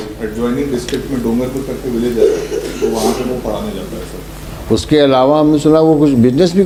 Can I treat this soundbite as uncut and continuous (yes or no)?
yes